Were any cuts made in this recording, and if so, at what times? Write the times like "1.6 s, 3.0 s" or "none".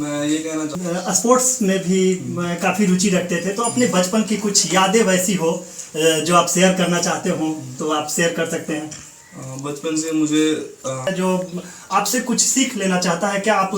0.7 s, 11.1 s

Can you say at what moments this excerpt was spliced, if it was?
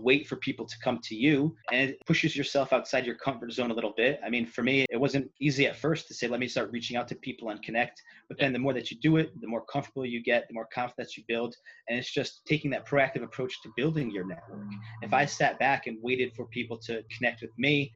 none

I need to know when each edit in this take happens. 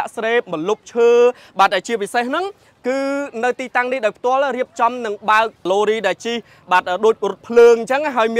5.7 s

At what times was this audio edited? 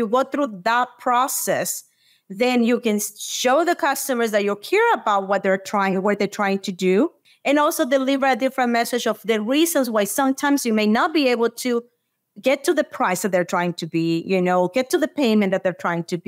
7.2 s

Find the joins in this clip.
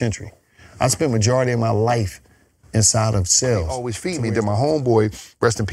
4.0 s

